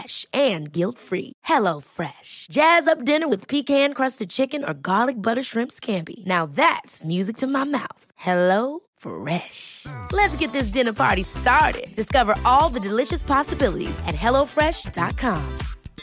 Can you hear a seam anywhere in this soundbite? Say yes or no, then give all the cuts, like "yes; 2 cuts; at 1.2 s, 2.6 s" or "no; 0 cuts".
no; 0 cuts